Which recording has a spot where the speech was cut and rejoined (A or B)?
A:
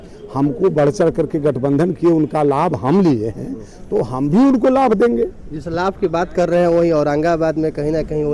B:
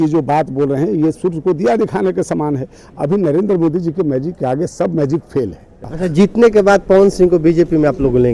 B